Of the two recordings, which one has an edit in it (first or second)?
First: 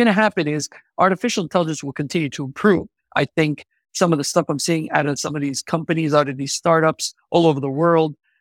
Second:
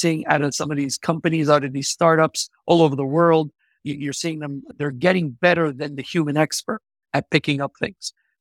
second